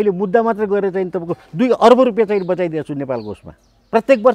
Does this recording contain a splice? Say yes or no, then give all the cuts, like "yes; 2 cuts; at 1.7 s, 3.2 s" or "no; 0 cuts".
no; 0 cuts